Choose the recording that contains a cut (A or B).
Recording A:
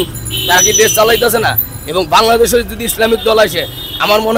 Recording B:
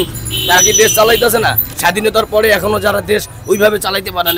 B